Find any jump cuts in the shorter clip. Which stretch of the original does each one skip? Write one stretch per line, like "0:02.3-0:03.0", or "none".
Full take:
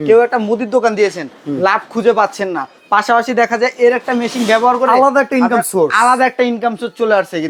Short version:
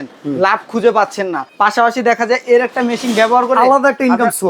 0:02.7-0:02.8